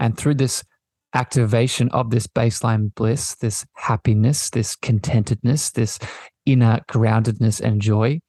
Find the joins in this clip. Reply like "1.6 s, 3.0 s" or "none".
none